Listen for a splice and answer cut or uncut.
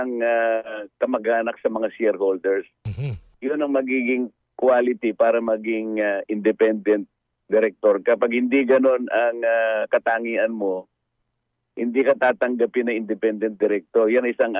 uncut